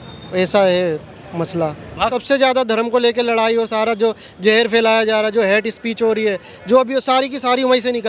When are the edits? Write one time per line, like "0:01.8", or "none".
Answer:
0:02.1